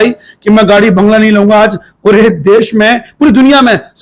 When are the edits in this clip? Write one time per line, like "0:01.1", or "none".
none